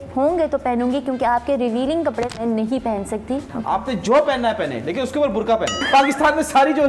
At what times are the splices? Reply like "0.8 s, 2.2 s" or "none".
3.5 s, 5.8 s